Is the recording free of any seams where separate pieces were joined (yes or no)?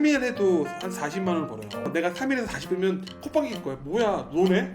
no